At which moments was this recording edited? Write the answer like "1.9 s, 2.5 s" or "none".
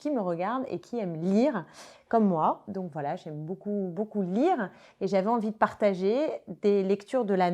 none